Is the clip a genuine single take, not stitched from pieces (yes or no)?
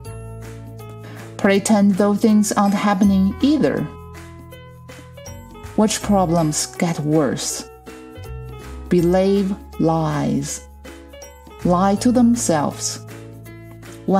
no